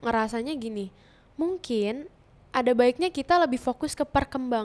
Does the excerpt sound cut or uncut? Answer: uncut